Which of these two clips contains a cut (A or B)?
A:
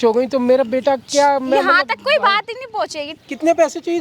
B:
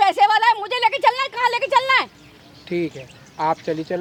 A